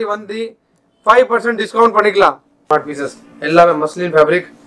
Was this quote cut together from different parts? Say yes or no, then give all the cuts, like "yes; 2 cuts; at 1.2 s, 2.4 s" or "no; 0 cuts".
yes; 1 cut; at 2.6 s